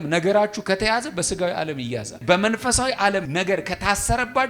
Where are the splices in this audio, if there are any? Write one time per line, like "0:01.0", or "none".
0:02.2
0:03.3